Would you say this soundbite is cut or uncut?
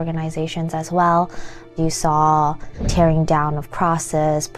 cut